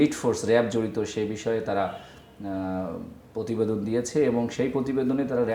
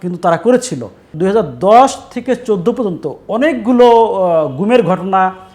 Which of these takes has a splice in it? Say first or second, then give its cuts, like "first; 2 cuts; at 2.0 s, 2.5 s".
second; 1 cut; at 1.1 s